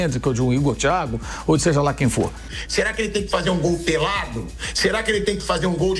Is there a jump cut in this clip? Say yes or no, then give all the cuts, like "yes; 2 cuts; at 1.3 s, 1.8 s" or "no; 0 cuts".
yes; 1 cut; at 2.4 s